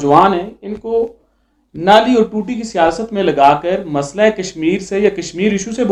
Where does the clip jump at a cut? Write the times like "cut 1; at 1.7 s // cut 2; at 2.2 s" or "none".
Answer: none